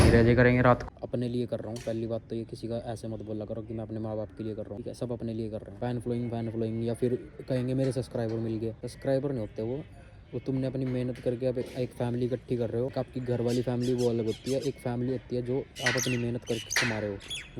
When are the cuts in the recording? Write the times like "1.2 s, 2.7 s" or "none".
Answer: 0.8 s, 4.8 s, 5.7 s, 8.9 s, 12.9 s, 15.7 s